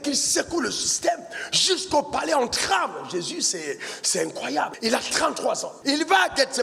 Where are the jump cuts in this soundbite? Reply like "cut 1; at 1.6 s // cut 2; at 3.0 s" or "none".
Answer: cut 1; at 4.7 s // cut 2; at 5.7 s